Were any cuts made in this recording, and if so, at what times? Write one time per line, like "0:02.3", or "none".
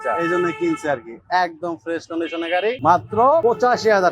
0:02.8
0:03.4